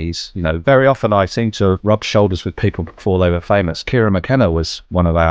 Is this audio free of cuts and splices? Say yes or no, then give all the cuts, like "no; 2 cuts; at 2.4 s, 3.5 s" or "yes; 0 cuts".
no; 2 cuts; at 1.8 s, 3.8 s